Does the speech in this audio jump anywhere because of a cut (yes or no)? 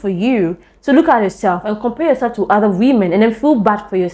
no